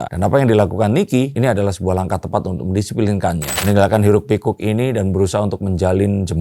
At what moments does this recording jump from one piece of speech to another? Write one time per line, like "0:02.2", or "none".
0:03.5